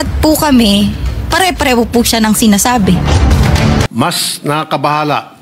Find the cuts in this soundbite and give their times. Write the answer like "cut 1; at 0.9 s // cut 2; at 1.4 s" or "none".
cut 1; at 3.9 s